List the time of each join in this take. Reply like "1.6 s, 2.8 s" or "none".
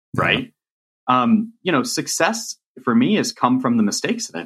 none